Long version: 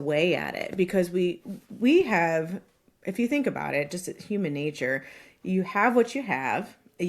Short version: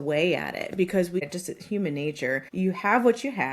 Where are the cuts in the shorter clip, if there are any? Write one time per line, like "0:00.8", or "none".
0:01.2
0:02.5

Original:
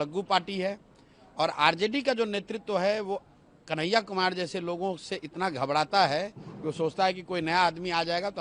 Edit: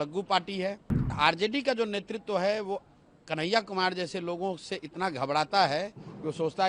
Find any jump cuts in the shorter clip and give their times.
0:01.1

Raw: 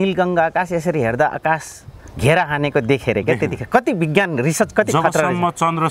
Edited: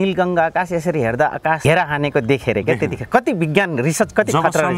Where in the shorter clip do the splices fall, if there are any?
0:01.6

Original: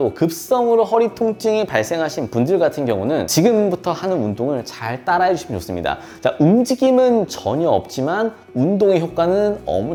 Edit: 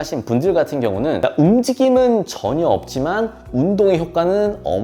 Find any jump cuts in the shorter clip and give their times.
0:01.2

